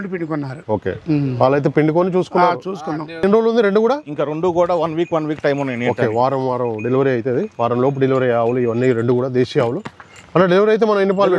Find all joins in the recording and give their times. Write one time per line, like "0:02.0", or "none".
0:03.2